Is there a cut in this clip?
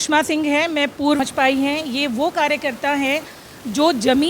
yes; 1 cut; at 1.2 s

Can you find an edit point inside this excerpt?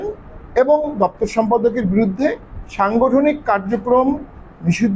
no; 0 cuts

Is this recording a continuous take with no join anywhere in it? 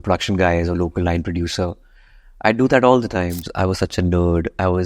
no; 1 cut; at 3.4 s

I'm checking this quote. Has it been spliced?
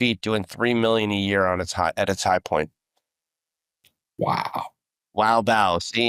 no; 0 cuts

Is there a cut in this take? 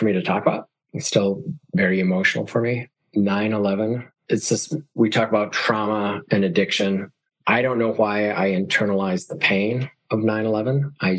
no; 0 cuts

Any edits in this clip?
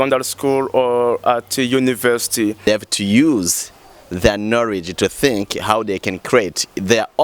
yes; 1 cut; at 2.7 s

